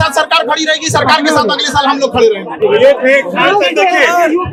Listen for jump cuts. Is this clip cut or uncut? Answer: uncut